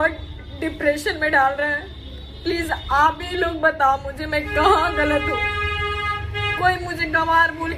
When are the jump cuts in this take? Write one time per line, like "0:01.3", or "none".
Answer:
none